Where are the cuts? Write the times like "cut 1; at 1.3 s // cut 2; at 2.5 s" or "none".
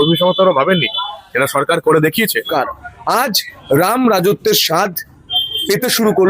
cut 1; at 2.5 s